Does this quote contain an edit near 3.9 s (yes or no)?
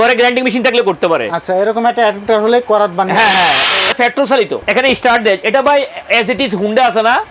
yes